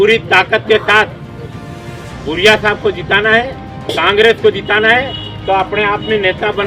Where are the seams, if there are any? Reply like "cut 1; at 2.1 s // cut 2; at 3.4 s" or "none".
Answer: none